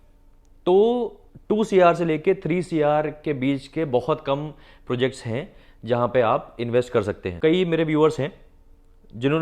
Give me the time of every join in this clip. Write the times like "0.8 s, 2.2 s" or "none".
7.3 s